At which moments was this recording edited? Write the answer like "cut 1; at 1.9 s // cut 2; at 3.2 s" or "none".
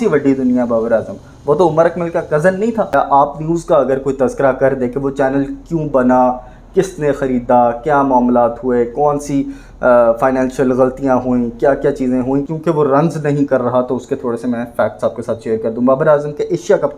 cut 1; at 2.9 s // cut 2; at 12.5 s